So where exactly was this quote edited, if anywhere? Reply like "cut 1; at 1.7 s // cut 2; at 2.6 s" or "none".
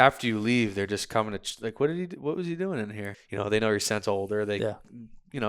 cut 1; at 3.1 s

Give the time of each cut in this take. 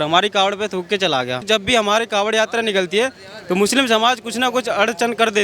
cut 1; at 1.4 s

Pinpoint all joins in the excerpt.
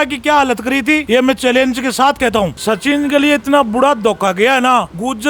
cut 1; at 1.0 s // cut 2; at 2.6 s

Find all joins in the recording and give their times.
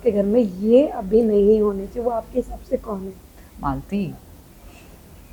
none

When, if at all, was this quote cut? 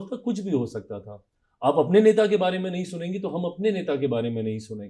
none

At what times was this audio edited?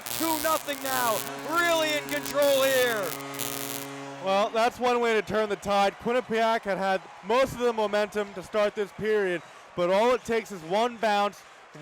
none

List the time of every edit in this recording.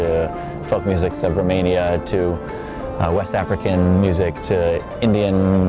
none

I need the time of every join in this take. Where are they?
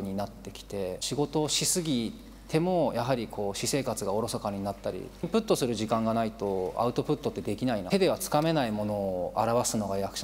cut 1; at 1.0 s // cut 2; at 5.3 s // cut 3; at 7.8 s

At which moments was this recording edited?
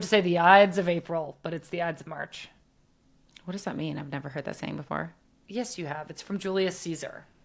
none

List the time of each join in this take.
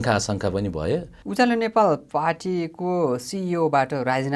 cut 1; at 1.2 s

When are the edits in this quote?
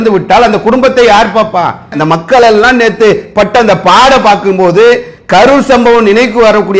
cut 1; at 1.9 s

